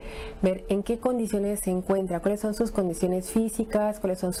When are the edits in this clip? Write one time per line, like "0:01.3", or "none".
none